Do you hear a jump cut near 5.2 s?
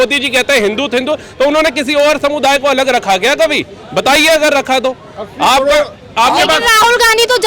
no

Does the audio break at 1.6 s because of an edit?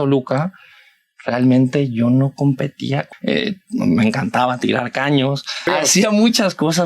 no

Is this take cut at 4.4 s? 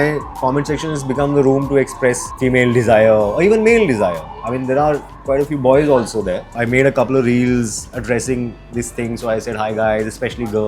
no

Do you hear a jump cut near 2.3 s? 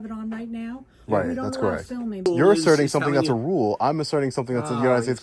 yes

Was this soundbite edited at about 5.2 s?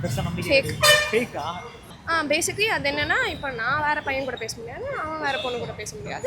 no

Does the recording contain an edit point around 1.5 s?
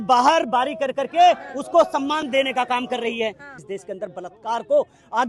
no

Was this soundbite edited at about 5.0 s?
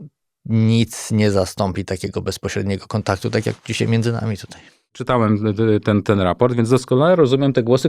yes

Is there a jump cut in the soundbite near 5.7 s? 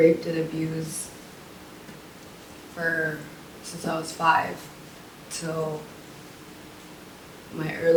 no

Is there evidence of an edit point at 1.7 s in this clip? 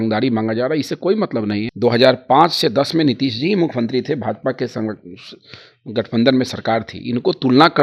yes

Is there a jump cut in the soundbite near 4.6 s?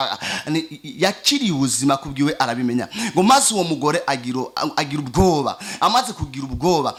no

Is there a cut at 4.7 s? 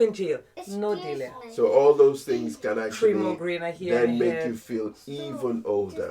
no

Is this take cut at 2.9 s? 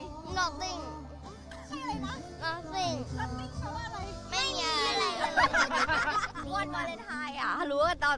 no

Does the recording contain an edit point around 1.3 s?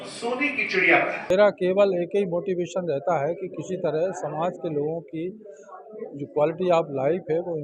yes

